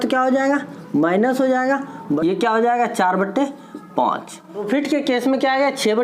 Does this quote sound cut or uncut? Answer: cut